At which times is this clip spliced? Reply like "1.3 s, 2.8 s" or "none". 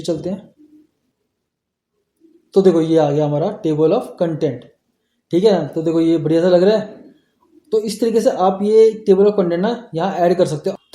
none